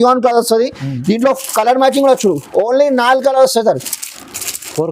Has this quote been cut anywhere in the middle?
no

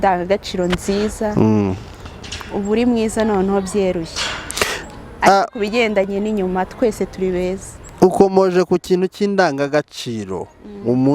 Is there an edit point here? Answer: no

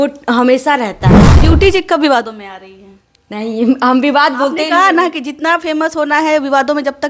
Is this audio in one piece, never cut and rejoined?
no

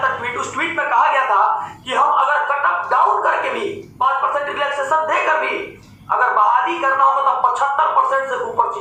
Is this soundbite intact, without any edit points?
yes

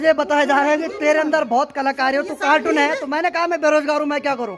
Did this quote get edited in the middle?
no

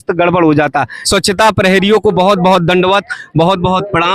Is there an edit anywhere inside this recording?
yes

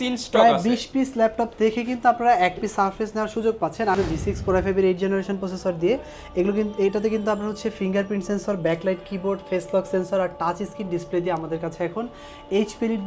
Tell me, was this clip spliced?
yes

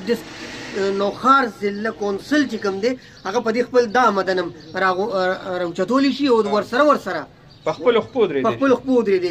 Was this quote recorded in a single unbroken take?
yes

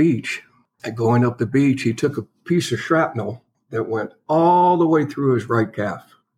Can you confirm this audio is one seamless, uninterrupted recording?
yes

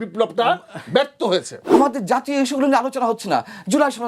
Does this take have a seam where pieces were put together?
yes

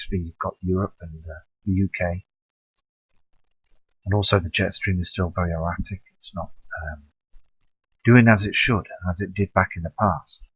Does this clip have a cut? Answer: yes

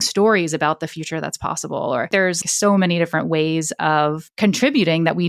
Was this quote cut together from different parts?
yes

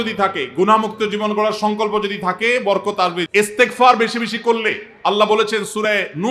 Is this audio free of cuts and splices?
no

